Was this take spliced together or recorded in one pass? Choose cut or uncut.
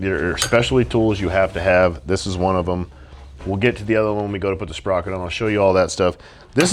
uncut